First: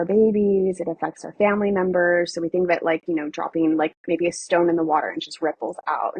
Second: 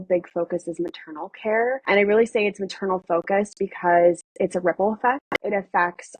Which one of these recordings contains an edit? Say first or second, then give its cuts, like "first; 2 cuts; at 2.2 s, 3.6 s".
second; 2 cuts; at 1.8 s, 5.3 s